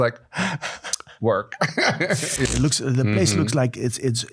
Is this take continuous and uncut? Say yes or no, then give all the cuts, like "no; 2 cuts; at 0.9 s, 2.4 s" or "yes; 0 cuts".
no; 1 cut; at 2.5 s